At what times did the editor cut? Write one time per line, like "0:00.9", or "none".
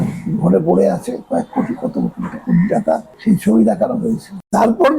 none